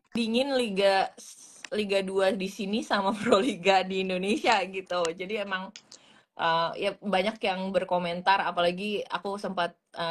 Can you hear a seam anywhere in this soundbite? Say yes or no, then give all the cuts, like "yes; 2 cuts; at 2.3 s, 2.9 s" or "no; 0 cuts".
no; 0 cuts